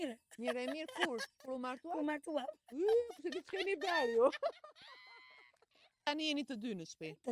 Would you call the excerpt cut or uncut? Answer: cut